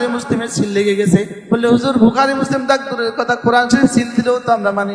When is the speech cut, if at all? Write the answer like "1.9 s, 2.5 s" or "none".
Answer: 1.4 s